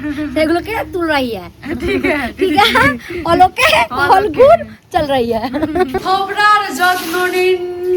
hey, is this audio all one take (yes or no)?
yes